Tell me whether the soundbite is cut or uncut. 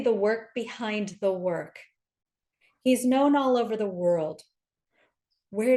uncut